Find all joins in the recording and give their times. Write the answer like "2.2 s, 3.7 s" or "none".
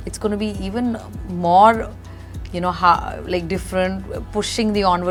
none